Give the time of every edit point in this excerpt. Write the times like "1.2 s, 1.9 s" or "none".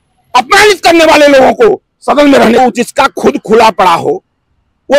2.6 s